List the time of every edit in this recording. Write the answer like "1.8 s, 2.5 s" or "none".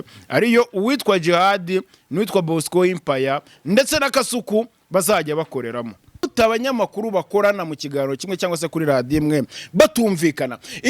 6.3 s